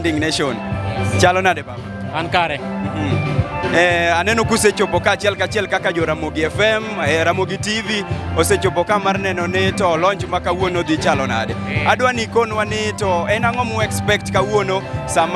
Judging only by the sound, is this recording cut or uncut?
uncut